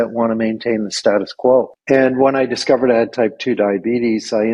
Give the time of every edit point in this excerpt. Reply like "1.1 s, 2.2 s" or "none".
1.8 s